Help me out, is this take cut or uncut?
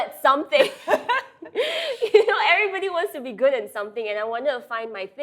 uncut